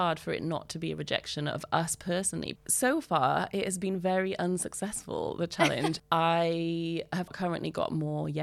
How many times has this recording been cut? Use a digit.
3